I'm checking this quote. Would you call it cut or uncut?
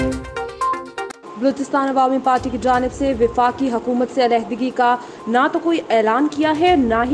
cut